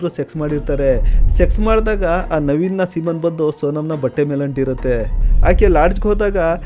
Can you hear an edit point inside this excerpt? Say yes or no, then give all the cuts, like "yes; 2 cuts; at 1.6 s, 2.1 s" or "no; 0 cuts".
yes; 1 cut; at 5.2 s